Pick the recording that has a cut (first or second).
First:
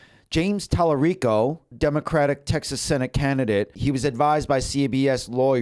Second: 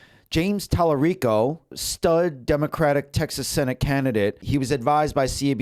first